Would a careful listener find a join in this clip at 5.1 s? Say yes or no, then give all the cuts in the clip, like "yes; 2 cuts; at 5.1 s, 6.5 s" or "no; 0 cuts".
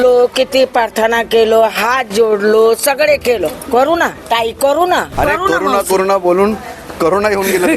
yes; 2 cuts; at 4.2 s, 5.1 s